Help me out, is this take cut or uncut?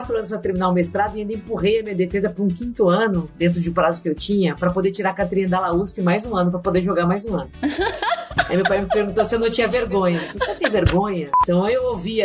cut